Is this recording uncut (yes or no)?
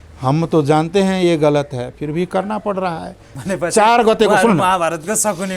no